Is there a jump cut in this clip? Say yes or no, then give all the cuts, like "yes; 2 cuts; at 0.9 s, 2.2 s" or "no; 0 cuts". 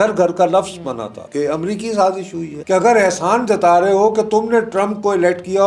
yes; 2 cuts; at 1.2 s, 2.5 s